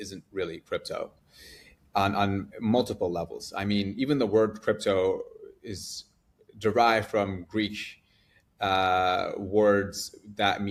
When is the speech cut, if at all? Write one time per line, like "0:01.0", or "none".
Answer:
none